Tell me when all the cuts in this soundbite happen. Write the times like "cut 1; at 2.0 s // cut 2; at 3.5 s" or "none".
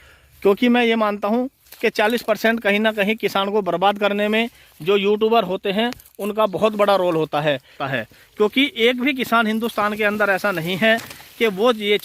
cut 1; at 7.8 s